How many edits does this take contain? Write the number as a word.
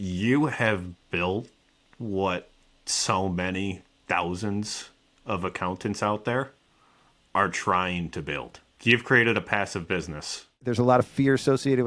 one